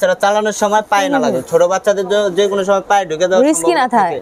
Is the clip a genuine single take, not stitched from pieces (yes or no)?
yes